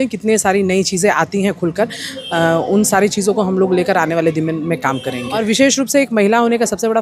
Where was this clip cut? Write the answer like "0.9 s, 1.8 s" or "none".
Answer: 5.4 s